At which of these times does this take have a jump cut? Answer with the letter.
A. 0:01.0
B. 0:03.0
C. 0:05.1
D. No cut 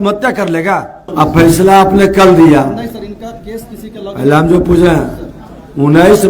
A